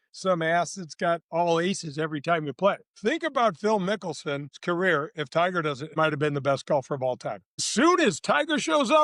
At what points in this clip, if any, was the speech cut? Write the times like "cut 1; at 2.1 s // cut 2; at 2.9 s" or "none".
cut 1; at 2.9 s // cut 2; at 4.5 s // cut 3; at 5.9 s // cut 4; at 7.7 s

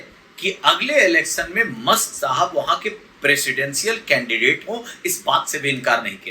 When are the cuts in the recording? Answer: none

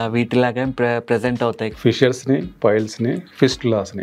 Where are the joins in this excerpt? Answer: cut 1; at 1.8 s

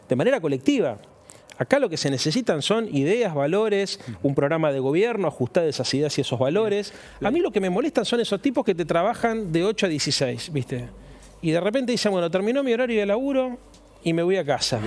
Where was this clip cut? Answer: cut 1; at 7.0 s

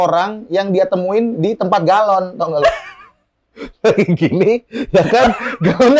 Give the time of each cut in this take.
none

